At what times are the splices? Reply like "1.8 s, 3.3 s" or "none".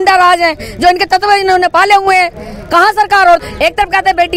3.4 s